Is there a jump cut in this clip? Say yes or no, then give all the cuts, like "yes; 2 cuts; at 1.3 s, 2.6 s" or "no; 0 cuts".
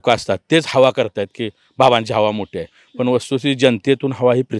no; 0 cuts